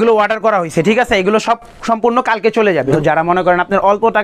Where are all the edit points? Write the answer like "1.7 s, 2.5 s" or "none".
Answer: 3.0 s

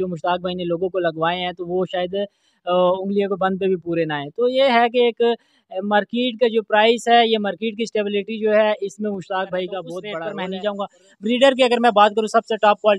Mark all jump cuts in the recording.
10.3 s

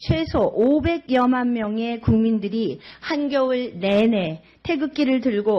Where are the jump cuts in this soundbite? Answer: 2.0 s

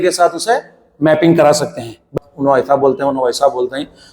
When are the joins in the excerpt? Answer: 2.1 s

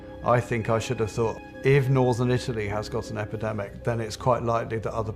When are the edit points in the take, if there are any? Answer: 1.4 s

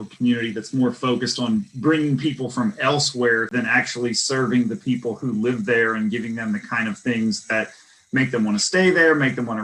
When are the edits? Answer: 3.5 s

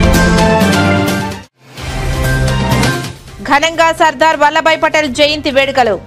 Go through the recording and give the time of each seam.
none

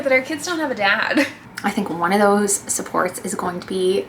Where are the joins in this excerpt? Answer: 1.5 s

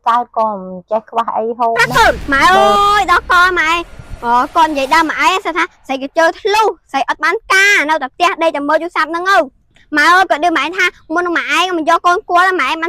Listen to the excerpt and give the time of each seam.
1.8 s

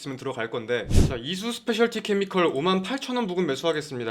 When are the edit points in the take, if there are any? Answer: 0.9 s

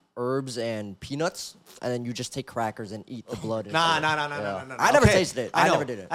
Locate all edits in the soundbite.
none

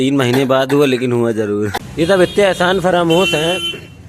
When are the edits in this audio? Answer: 1.7 s

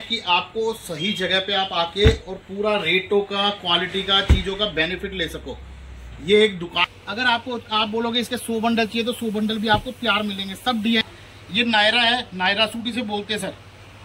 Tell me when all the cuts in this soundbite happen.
6.8 s, 11.0 s

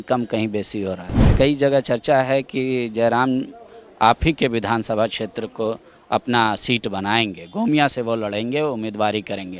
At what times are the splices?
1.3 s

